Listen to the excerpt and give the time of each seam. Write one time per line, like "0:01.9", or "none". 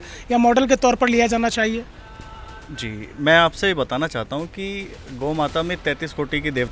none

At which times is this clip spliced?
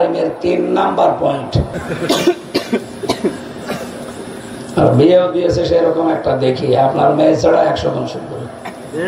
0:01.7

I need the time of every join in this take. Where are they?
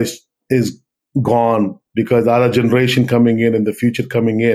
0:01.8

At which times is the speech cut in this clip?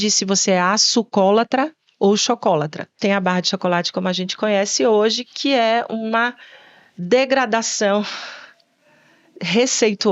0:03.0

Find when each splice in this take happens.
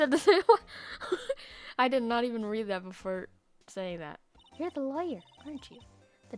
0:04.2

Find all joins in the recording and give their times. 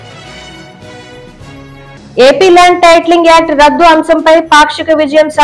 0:02.1

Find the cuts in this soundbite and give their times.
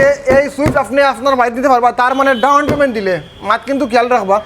none

